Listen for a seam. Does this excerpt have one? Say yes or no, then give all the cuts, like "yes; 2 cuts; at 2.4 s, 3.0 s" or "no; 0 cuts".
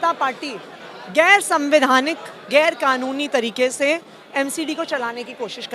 no; 0 cuts